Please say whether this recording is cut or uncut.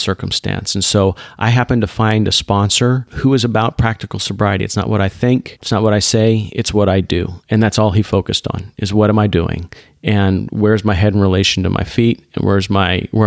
cut